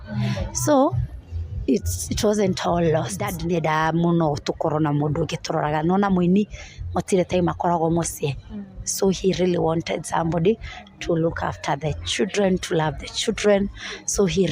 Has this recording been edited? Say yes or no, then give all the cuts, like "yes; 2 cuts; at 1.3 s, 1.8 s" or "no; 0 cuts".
yes; 1 cut; at 3.3 s